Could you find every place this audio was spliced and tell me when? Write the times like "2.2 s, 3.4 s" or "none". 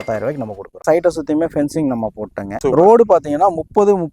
0.8 s, 2.5 s